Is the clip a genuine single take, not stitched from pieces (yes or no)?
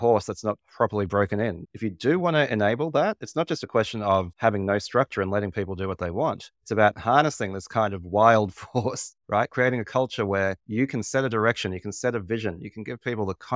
yes